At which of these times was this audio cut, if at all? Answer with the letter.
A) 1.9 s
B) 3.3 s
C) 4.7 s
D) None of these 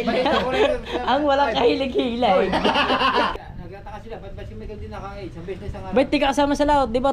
B